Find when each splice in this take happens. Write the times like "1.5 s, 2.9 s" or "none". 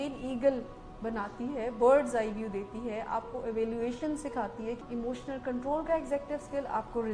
4.8 s